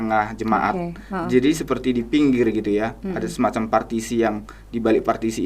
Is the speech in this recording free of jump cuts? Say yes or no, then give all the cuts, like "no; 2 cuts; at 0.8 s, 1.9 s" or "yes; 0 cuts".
yes; 0 cuts